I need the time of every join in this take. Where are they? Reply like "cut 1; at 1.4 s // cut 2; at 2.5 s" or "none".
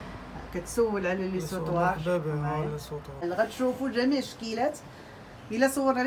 cut 1; at 3.2 s